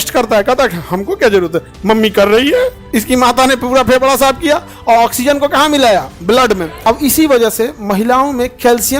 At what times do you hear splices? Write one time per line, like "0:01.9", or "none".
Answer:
0:02.8
0:06.7